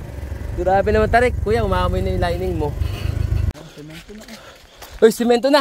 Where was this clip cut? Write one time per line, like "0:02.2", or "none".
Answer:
0:03.5